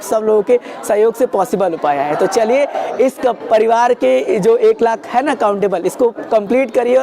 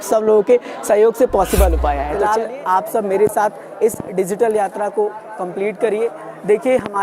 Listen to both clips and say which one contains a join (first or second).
second